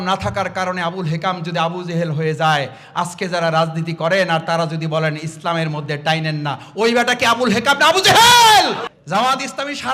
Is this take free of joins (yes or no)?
no